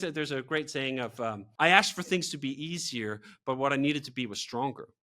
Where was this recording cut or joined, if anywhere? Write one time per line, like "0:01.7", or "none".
0:01.4